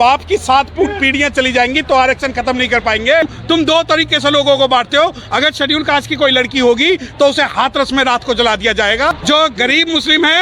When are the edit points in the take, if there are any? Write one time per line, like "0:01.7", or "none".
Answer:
0:03.4
0:09.2